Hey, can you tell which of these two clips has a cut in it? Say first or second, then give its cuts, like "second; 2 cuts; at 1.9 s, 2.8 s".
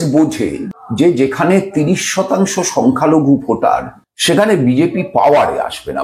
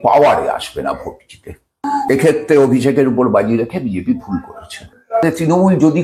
second; 2 cuts; at 2.1 s, 5.2 s